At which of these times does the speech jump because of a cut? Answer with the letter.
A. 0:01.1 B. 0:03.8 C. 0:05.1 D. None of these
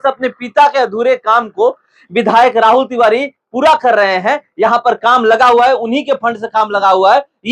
D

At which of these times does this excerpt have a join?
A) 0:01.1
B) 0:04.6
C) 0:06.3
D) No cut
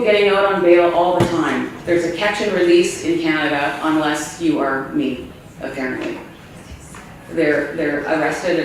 D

